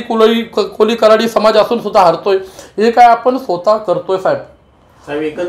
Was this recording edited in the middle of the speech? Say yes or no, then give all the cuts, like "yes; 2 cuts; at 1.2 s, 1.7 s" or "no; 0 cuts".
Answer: no; 0 cuts